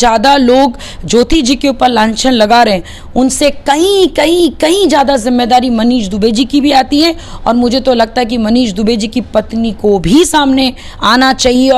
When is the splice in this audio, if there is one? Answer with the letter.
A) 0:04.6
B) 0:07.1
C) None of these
C